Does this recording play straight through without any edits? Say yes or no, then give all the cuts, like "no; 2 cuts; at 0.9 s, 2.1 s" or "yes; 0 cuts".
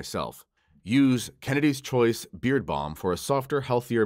yes; 0 cuts